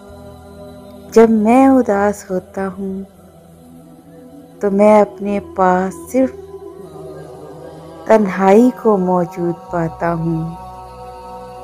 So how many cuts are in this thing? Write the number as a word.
four